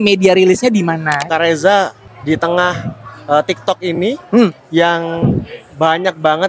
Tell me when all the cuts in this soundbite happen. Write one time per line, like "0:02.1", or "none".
0:01.3
0:02.1